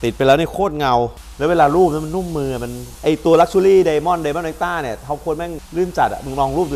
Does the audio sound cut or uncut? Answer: cut